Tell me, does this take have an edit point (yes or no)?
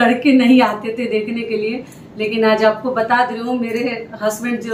no